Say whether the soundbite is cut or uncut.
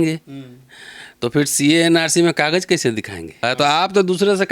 cut